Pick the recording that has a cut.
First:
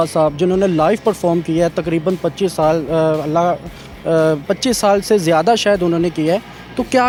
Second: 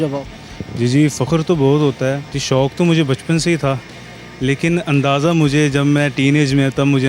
second; 1 cut; at 2.3 s

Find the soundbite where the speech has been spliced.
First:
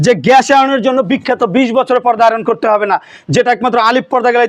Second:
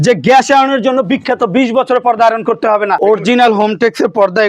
second; 1 cut; at 3.0 s

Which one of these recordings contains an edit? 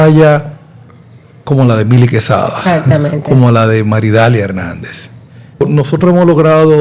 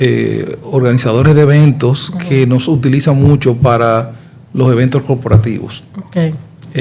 first; 1 cut; at 5.6 s

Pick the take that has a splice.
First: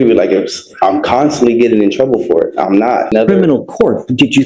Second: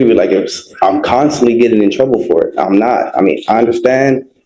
first; 1 cut; at 3.1 s

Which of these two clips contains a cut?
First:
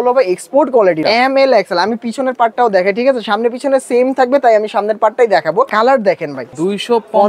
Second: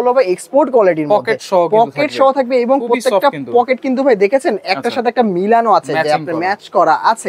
first; 3 cuts; at 1.0 s, 5.7 s, 6.5 s

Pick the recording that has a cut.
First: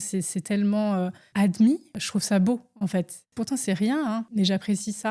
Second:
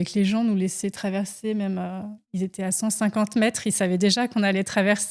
first; 4 cuts; at 1.2 s, 1.9 s, 3.2 s, 4.3 s

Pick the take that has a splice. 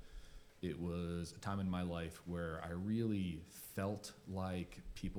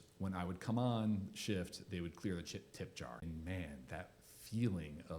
second; 1 cut; at 3.2 s

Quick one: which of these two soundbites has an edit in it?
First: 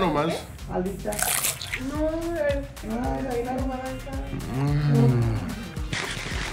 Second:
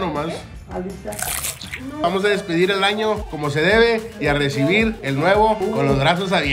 second; 4 cuts; at 2.0 s, 3.3 s, 5.0 s, 5.6 s

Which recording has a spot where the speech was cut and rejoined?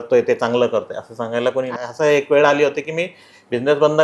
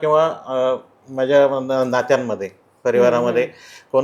first; 1 cut; at 1.7 s

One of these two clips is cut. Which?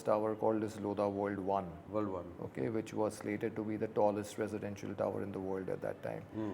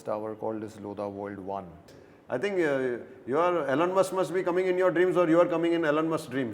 second; 1 cut; at 1.9 s

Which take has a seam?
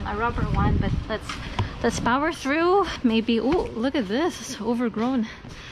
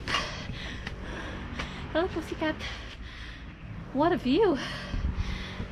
first; 1 cut; at 2.9 s

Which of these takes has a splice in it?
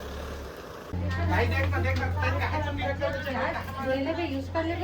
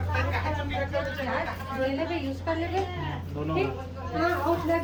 first; 1 cut; at 0.9 s

